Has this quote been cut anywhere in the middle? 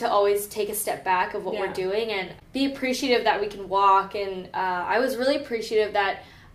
yes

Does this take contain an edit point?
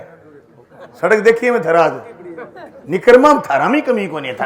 no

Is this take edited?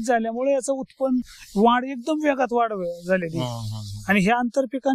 no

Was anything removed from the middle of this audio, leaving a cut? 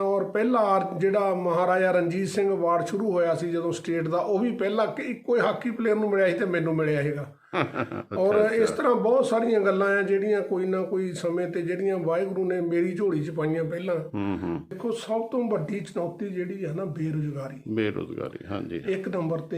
yes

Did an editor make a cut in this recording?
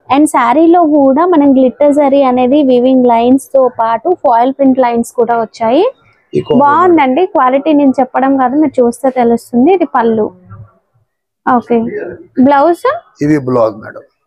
no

